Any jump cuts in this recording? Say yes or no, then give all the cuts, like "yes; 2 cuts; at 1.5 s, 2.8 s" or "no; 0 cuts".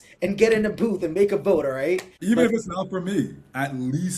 yes; 1 cut; at 2.1 s